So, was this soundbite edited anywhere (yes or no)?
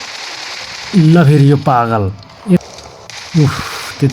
yes